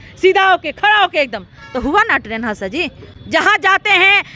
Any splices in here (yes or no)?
no